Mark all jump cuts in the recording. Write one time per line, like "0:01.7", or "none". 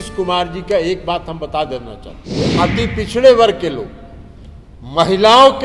0:02.4